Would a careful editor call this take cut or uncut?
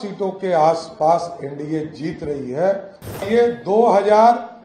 cut